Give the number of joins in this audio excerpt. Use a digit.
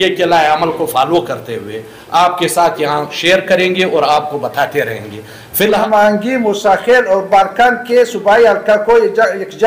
1